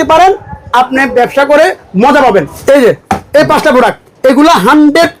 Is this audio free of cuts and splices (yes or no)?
no